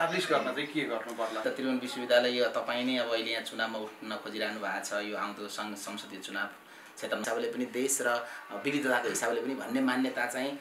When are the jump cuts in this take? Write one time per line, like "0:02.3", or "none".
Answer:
0:01.5
0:07.2